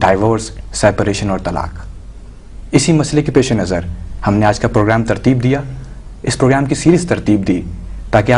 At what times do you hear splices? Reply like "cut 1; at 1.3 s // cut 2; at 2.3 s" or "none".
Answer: cut 1; at 2.0 s